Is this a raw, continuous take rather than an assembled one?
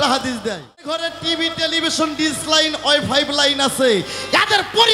no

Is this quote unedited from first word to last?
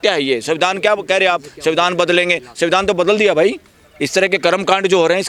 yes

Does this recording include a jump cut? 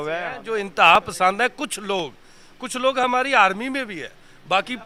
no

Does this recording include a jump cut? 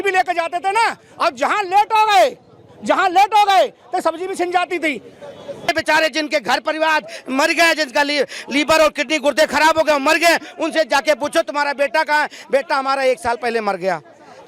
yes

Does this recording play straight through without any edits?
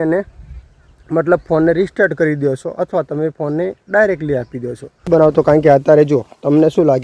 no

